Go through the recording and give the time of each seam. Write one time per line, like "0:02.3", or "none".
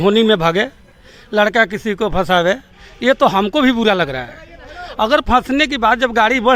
none